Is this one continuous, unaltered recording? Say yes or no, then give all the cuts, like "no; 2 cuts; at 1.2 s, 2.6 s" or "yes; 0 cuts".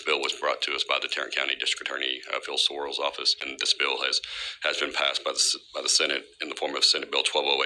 no; 1 cut; at 3.4 s